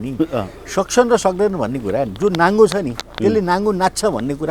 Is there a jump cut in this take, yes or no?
no